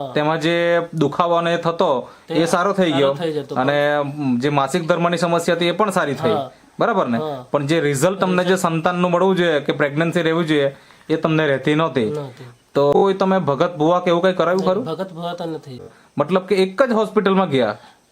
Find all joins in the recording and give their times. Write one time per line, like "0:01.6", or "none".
0:12.9
0:15.9